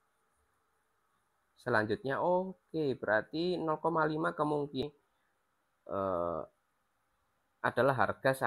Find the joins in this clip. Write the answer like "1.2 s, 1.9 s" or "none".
4.8 s